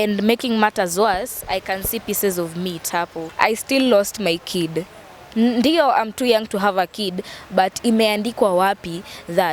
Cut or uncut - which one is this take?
cut